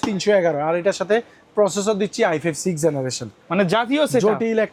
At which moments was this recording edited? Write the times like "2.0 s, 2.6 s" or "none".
none